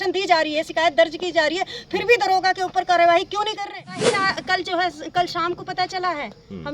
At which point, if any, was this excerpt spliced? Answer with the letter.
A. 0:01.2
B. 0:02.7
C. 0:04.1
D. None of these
C